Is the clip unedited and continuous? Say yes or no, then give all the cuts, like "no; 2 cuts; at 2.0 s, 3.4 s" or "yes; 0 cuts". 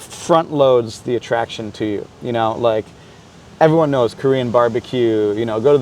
yes; 0 cuts